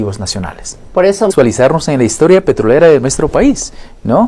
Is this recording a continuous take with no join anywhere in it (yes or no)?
yes